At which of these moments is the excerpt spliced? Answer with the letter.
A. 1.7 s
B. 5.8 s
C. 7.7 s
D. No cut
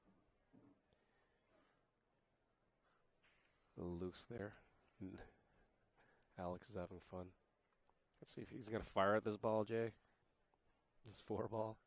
D